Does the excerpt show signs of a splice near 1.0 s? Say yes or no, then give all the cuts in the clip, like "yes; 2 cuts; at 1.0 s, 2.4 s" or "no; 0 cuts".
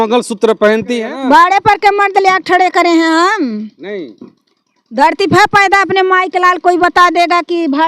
yes; 1 cut; at 1.0 s